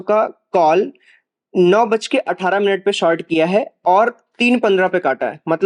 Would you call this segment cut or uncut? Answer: uncut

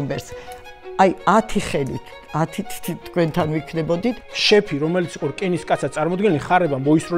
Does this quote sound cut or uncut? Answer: cut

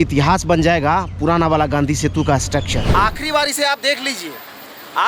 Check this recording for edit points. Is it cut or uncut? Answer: cut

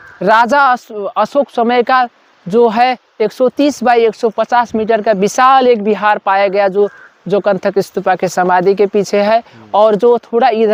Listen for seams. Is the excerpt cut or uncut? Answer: uncut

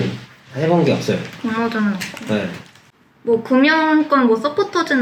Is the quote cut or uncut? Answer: uncut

